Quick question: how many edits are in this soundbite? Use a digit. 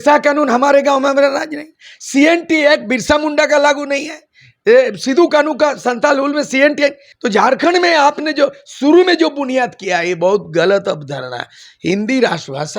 1